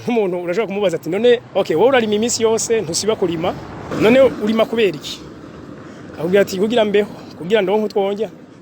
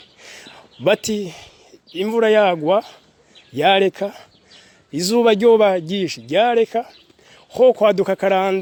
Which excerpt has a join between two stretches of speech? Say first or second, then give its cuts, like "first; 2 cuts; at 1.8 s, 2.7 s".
first; 2 cuts; at 1.5 s, 3.9 s